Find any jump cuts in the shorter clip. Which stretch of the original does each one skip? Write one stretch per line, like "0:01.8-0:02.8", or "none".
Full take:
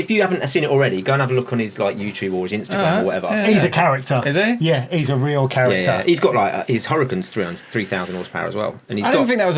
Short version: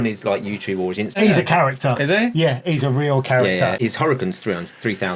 0:02.7-0:03.4
0:06.0-0:06.7